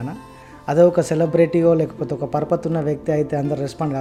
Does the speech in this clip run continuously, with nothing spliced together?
yes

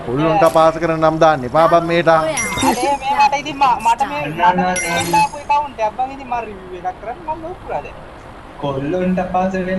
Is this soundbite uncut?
yes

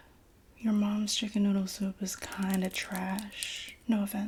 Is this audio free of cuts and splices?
yes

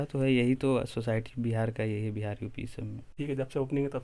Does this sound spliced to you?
yes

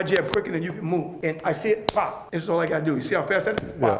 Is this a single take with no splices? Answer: no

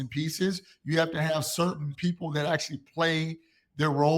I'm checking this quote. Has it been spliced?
yes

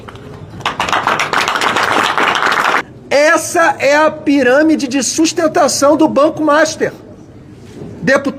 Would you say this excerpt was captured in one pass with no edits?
no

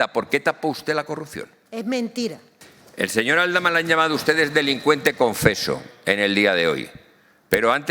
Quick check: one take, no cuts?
no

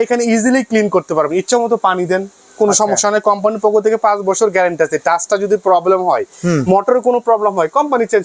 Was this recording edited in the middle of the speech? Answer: no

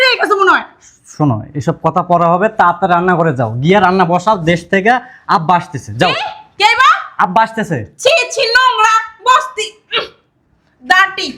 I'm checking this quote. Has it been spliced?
no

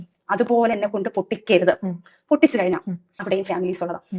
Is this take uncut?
no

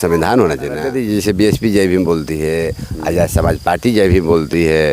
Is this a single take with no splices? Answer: no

